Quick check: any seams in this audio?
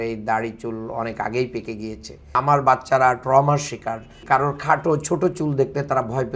yes; 2 cuts; at 2.2 s, 4.2 s

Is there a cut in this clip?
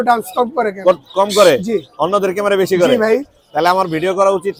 no; 0 cuts

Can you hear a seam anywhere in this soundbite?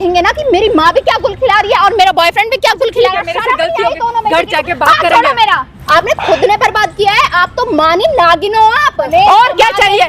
yes; 2 cuts; at 5.7 s, 9.1 s

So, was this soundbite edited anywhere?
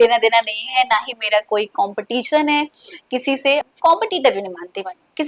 yes; 1 cut; at 3.6 s

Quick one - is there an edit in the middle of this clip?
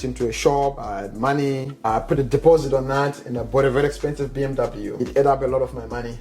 yes; 3 cuts; at 0.8 s, 1.9 s, 5.0 s

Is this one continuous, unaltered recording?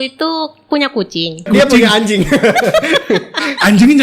no; 1 cut; at 1.5 s

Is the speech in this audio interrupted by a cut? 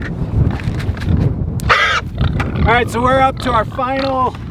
yes; 1 cut; at 2.2 s

